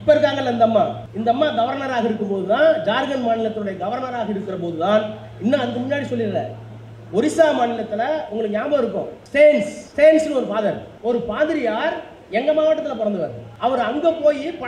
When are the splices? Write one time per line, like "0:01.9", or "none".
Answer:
0:01.0
0:09.2
0:09.8
0:10.9
0:13.4